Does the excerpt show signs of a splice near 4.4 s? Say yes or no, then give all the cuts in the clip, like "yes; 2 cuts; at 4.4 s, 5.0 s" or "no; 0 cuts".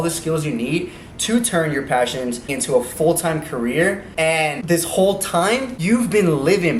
yes; 3 cuts; at 2.5 s, 4.4 s, 5.7 s